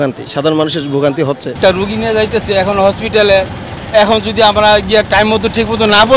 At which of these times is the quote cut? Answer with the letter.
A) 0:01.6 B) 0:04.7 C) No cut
A